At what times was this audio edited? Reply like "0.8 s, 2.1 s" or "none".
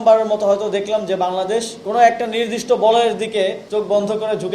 1.8 s, 3.6 s